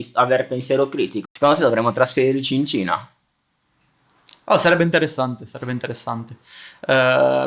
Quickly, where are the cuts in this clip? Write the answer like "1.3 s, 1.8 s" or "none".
1.2 s